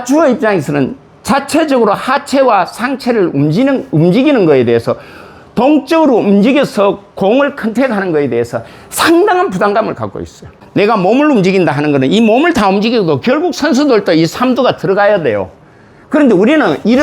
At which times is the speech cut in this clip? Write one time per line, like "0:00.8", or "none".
0:10.6